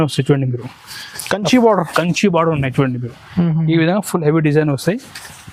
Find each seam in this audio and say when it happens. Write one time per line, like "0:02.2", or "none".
none